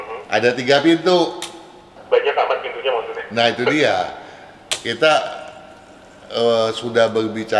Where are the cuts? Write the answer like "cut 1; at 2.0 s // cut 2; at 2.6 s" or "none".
cut 1; at 1.9 s